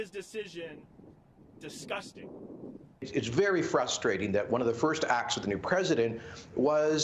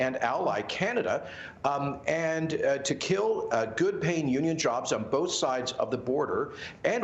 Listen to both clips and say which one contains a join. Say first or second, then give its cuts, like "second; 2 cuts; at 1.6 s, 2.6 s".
first; 1 cut; at 3.0 s